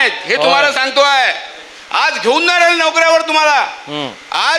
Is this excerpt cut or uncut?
uncut